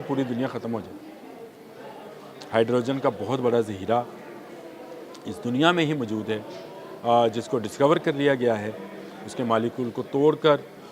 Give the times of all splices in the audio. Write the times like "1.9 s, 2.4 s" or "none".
none